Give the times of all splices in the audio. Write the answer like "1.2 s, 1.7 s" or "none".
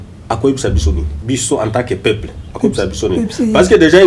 1.1 s